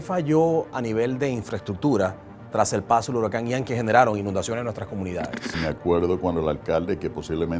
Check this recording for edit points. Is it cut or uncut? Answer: cut